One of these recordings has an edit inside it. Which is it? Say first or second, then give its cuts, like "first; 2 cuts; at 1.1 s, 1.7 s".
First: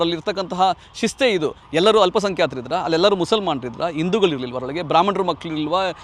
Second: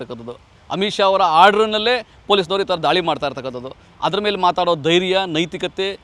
first; 1 cut; at 1.6 s